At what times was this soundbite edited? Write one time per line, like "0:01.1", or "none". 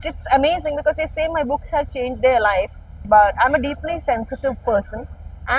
0:03.0

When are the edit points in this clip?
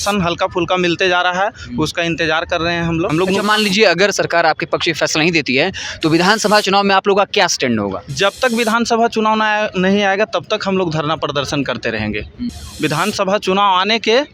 0:03.1
0:12.6

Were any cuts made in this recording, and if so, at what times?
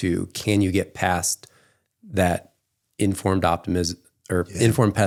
none

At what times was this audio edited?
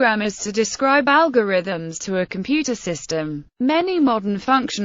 0:02.1

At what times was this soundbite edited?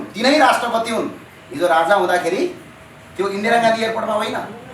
none

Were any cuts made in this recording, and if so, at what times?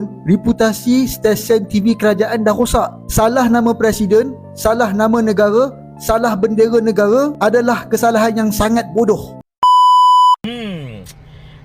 0:09.3
0:10.3

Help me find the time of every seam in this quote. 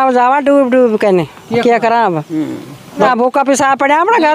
0:03.1

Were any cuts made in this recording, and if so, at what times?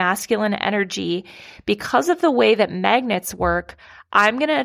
none

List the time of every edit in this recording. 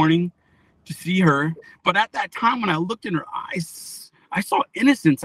0:01.6

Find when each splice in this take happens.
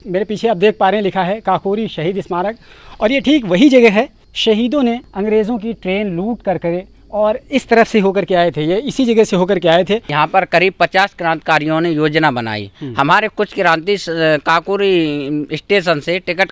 0:04.2
0:05.1
0:10.1

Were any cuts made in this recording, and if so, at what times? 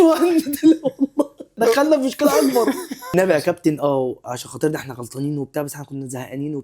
0:01.6
0:03.1

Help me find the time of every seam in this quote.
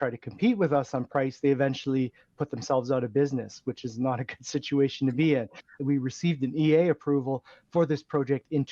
0:05.8

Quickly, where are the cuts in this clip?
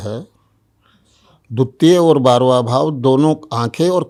none

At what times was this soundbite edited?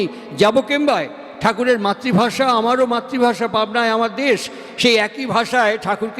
none

